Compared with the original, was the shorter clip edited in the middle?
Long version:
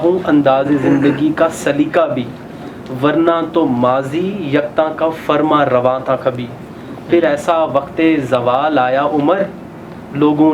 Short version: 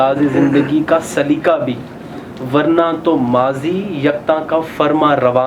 no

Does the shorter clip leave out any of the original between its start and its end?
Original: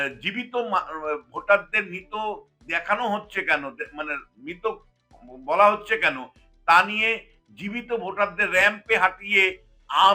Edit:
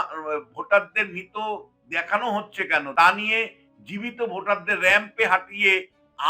yes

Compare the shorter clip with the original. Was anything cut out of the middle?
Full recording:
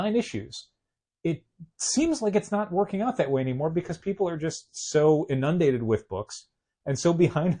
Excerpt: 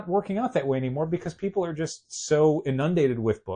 no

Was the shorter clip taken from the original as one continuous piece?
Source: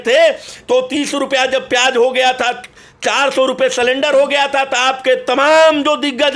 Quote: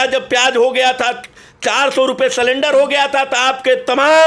yes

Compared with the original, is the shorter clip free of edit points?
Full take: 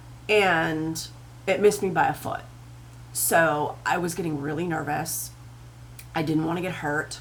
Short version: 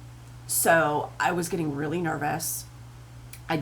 yes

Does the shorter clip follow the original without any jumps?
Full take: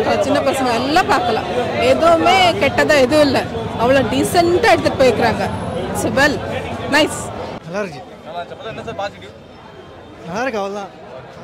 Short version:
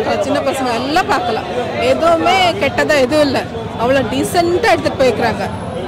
yes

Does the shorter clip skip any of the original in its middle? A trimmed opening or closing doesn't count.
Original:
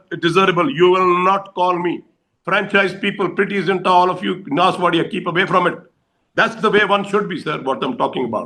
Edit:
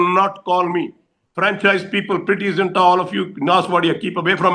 no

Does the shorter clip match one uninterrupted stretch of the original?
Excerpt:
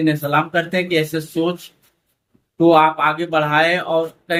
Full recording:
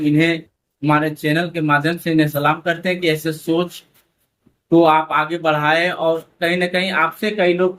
yes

